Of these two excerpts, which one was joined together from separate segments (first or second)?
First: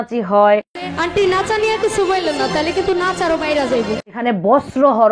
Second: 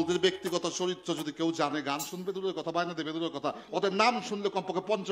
first